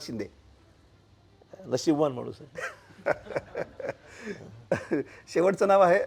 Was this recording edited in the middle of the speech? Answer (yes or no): no